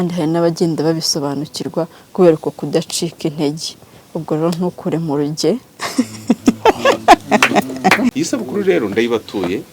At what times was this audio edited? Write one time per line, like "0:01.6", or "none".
0:08.1